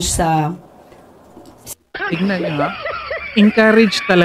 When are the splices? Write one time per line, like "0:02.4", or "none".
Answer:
none